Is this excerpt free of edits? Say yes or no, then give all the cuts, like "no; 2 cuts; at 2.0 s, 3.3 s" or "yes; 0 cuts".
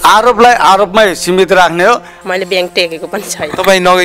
no; 1 cut; at 2.1 s